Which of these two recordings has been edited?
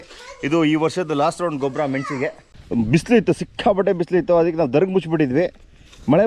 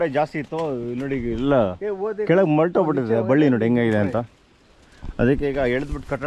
first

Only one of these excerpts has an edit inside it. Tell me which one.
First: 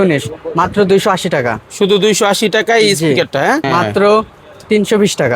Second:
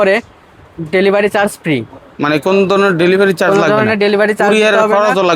first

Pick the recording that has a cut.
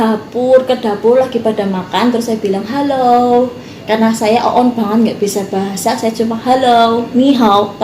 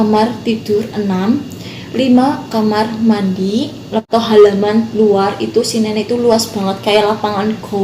second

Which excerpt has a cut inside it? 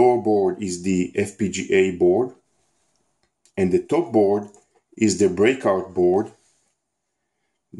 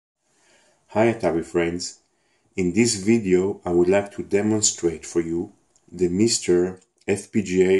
first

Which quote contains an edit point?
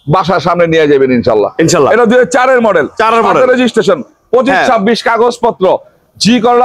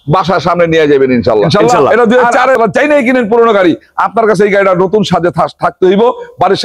second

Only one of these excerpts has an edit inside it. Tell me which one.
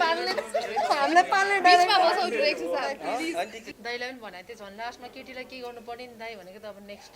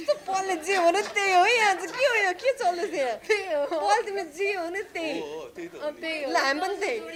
first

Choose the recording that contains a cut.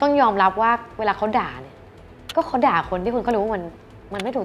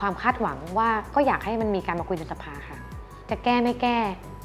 second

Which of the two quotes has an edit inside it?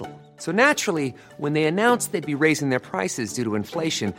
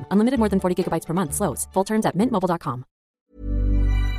second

